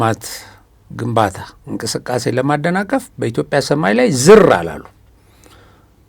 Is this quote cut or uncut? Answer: uncut